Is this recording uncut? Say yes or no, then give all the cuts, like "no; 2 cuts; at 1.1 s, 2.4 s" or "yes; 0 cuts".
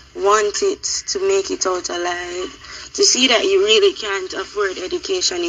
yes; 0 cuts